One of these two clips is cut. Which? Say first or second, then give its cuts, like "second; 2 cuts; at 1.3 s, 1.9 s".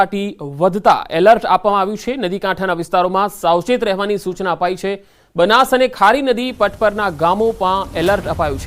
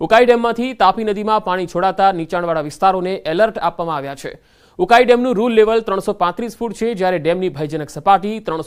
first; 1 cut; at 4.0 s